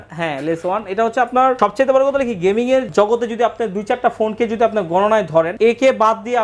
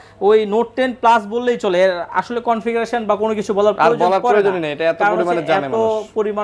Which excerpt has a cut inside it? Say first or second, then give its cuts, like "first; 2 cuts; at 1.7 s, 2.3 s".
first; 3 cuts; at 1.6 s, 2.9 s, 5.5 s